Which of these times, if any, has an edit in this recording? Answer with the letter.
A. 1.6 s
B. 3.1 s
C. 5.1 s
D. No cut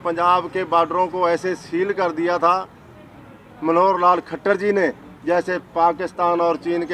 D